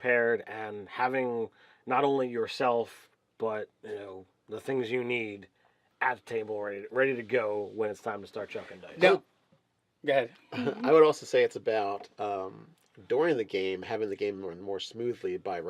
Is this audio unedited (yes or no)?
yes